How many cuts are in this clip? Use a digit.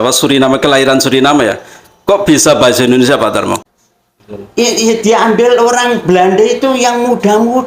1